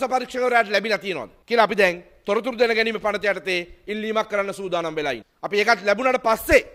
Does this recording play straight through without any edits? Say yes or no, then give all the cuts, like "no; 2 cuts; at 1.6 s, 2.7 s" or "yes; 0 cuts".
no; 2 cuts; at 1.3 s, 5.3 s